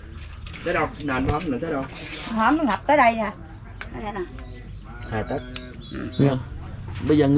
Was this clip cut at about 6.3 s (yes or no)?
yes